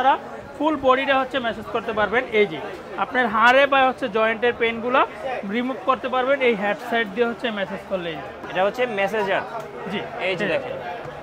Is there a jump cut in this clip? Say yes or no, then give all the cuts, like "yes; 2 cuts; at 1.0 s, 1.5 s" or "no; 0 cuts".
yes; 1 cut; at 8.4 s